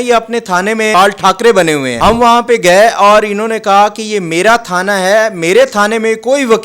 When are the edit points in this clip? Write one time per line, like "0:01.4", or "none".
0:00.9
0:01.9

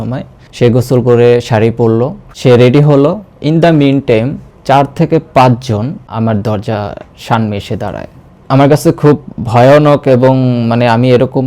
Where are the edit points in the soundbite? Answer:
0:02.3
0:06.1
0:08.3

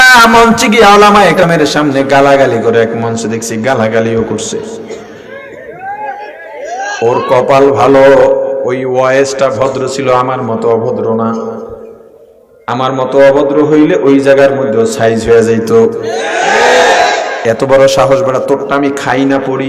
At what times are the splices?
0:01.4

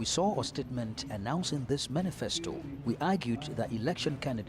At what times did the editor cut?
0:02.7

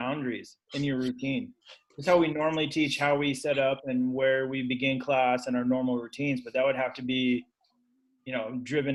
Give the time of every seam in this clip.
none

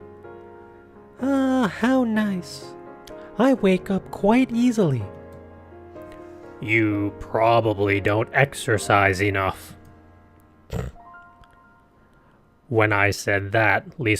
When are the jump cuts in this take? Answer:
0:01.2
0:07.8

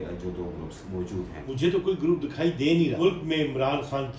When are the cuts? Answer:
0:01.5
0:03.0

